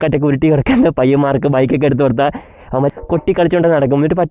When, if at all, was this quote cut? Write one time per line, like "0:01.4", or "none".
0:02.9